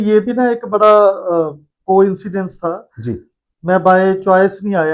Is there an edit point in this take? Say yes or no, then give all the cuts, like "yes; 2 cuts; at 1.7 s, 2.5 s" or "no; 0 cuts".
no; 0 cuts